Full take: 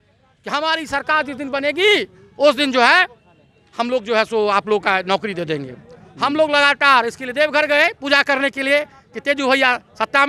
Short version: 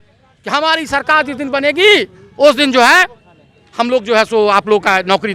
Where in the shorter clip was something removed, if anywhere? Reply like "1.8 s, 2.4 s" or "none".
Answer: none